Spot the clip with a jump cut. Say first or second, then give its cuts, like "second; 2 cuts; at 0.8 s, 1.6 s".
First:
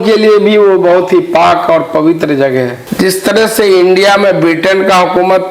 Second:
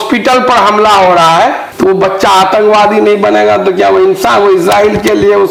first; 1 cut; at 2.8 s